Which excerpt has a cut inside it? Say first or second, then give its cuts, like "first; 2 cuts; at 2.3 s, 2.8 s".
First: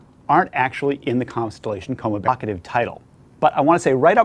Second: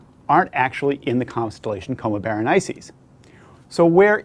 second; 1 cut; at 2.2 s